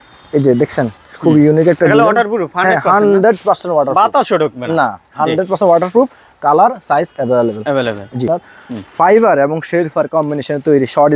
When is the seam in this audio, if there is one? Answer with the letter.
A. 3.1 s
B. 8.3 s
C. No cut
B